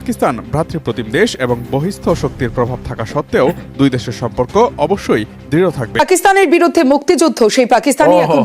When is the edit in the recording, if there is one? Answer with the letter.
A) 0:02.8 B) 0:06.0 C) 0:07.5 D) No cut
B